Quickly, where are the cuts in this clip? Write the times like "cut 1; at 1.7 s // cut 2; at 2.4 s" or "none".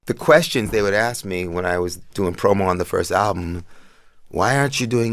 none

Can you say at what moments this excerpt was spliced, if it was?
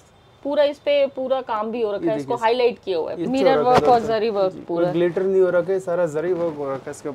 cut 1; at 3.3 s

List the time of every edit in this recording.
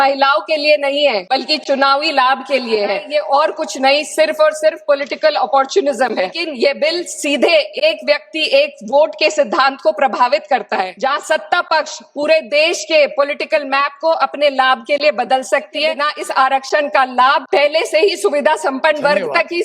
cut 1; at 1.2 s // cut 2; at 3.0 s // cut 3; at 6.4 s // cut 4; at 10.9 s // cut 5; at 16.1 s // cut 6; at 17.4 s

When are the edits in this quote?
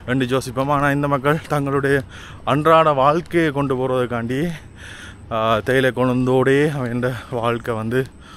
none

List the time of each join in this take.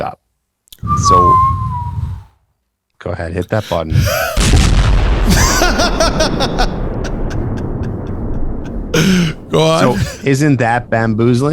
none

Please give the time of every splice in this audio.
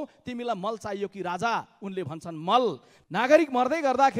cut 1; at 2.9 s

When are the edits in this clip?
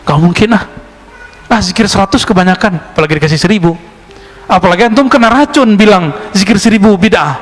none

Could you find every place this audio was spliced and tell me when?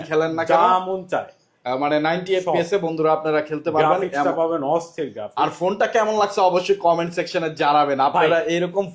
none

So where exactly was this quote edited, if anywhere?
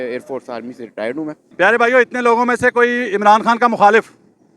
cut 1; at 1.4 s

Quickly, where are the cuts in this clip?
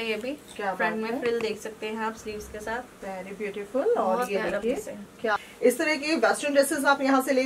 cut 1; at 5.4 s

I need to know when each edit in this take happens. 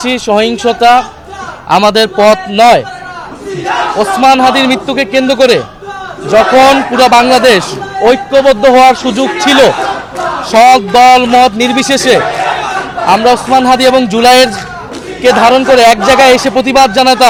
none

